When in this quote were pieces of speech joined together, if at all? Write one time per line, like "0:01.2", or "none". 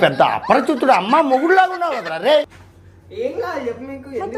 0:02.6